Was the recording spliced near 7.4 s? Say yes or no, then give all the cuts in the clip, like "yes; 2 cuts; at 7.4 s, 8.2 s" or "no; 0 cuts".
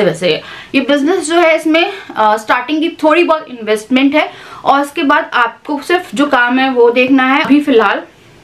yes; 1 cut; at 7.4 s